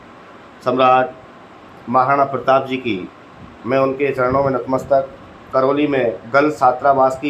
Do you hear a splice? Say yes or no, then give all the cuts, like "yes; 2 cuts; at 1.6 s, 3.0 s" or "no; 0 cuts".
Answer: yes; 1 cut; at 5.5 s